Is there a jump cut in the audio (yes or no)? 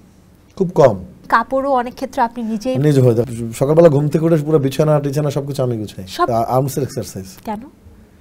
yes